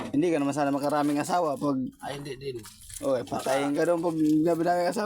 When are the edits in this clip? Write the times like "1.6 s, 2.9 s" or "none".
none